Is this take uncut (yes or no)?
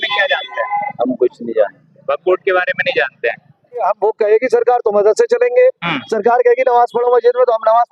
no